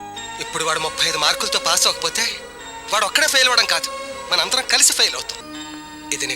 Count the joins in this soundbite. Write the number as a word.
one